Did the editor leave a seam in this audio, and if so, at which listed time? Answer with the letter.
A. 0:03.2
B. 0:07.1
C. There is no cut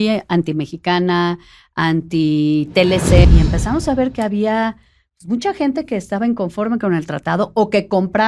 A